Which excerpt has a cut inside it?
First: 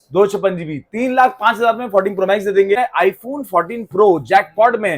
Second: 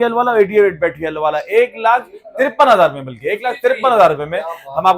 first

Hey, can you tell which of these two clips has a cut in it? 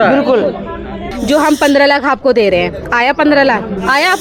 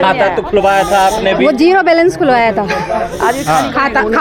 first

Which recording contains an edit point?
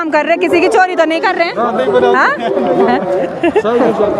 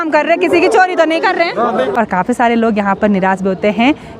second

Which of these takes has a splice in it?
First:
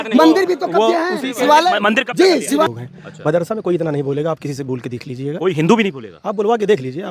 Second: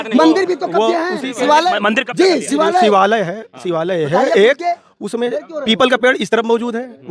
first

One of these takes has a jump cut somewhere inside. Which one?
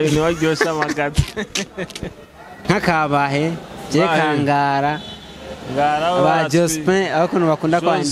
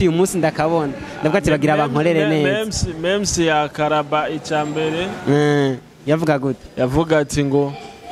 first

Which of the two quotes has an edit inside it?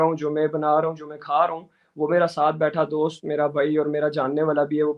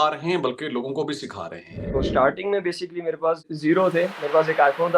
second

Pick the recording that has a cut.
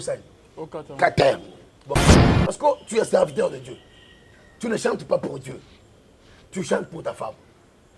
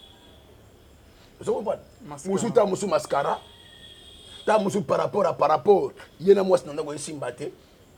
first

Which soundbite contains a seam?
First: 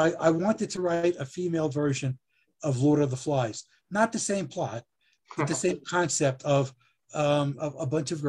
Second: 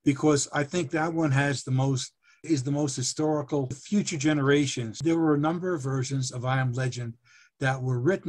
second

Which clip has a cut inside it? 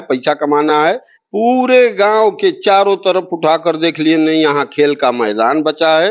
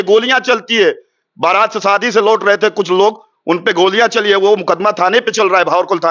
first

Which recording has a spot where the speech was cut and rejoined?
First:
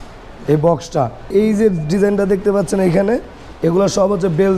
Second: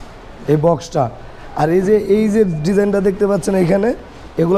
first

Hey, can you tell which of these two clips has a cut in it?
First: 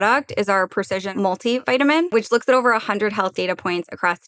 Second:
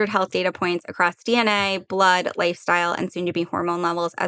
first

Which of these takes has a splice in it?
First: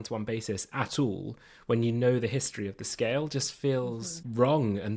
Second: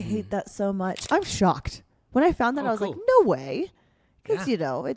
second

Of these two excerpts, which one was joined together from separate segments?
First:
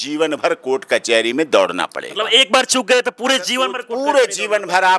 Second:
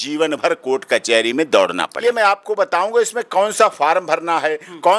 second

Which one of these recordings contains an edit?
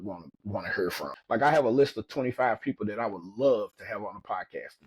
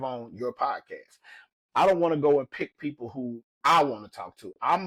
first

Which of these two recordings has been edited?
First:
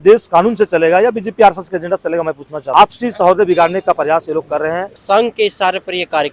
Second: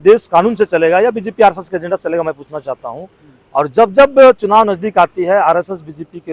first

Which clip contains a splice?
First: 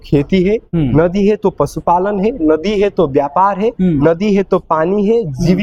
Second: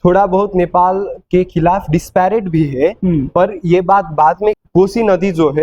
second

